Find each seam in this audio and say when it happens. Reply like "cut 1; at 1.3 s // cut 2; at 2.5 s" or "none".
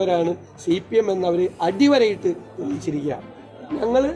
none